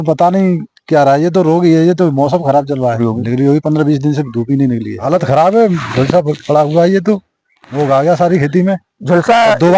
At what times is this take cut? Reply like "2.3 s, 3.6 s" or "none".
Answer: 3.0 s, 5.0 s